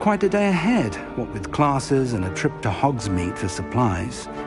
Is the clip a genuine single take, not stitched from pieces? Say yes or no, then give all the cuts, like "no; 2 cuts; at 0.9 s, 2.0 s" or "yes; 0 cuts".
yes; 0 cuts